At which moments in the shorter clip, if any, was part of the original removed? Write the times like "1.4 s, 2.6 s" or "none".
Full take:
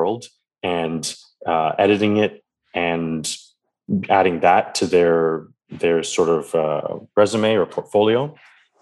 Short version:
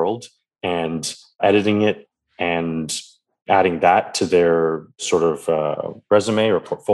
1.4 s, 3.4 s, 5.0 s